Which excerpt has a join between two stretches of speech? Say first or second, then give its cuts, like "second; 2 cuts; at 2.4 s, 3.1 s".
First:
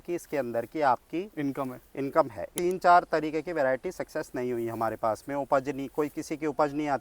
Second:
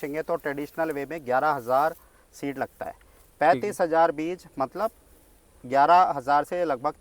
first; 1 cut; at 2.4 s